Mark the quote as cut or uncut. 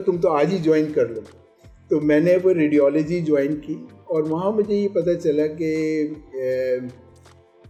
uncut